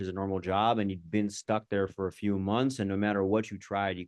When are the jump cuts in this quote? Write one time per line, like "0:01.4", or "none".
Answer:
none